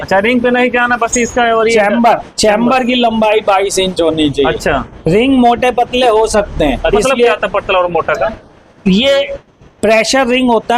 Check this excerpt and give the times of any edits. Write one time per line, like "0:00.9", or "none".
0:06.9